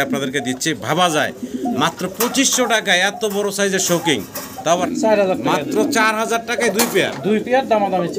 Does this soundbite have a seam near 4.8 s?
yes; 1 cut; at 4.8 s

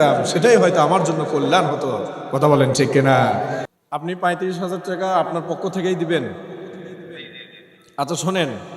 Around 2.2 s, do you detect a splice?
no; 1 cut; at 3.7 s

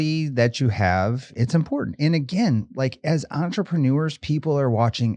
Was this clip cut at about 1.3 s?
yes; 1 cut; at 1.3 s

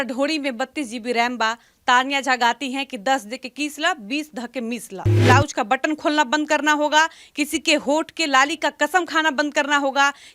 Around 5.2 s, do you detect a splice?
yes; 1 cut; at 5.2 s

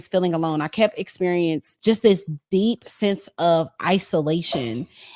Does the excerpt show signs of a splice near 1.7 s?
yes; 1 cut; at 1.7 s

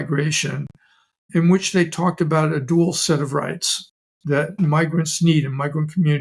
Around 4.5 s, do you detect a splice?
yes; 1 cut; at 4.5 s

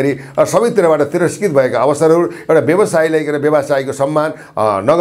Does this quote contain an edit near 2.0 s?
no; 0 cuts

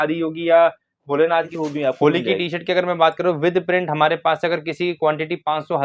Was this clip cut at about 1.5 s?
yes; 1 cut; at 1.5 s

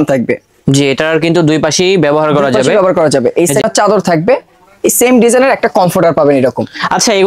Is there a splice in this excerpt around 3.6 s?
yes; 1 cut; at 3.6 s

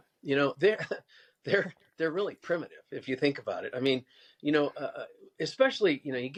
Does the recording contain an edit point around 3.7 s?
no; 0 cuts

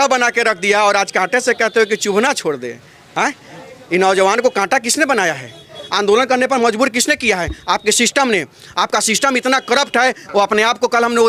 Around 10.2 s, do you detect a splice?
yes; 1 cut; at 10.2 s

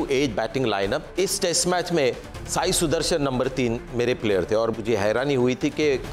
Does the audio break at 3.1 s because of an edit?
no; 2 cuts; at 1.1 s, 4.7 s

